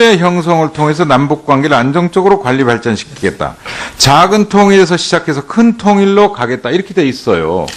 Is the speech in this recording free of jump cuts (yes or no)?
yes